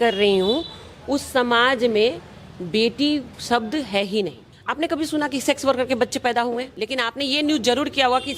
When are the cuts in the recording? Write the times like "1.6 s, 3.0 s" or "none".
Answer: 4.6 s, 6.9 s